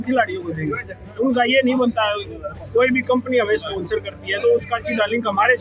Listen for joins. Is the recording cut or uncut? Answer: uncut